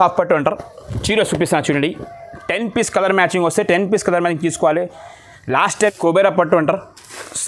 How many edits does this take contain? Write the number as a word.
one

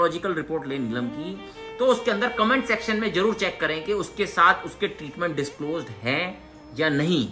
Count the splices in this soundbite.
zero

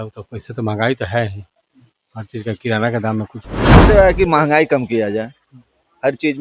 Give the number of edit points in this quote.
one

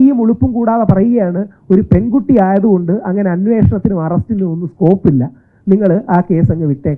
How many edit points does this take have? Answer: zero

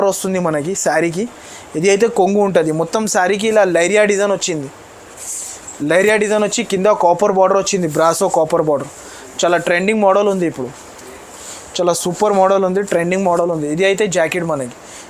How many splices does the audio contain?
zero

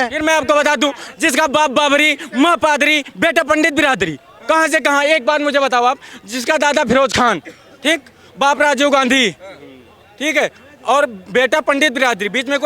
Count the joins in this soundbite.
zero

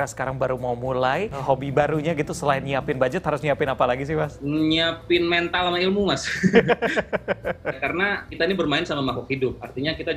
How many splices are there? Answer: three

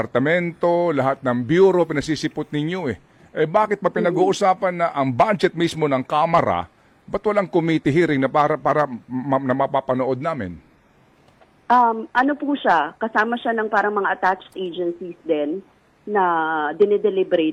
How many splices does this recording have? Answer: zero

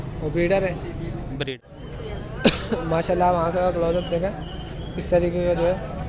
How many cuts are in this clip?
one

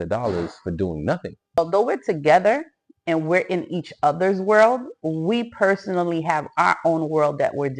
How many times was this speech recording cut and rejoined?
one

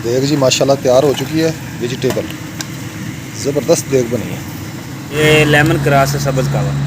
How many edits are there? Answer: one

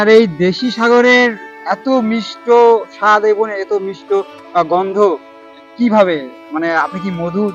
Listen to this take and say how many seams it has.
zero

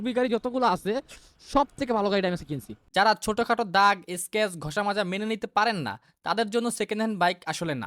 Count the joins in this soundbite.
one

